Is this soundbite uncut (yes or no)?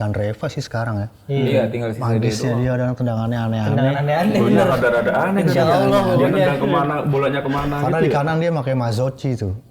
yes